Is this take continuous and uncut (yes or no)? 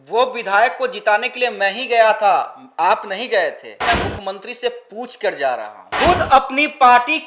no